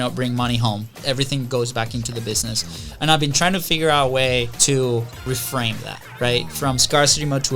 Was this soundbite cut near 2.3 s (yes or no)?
no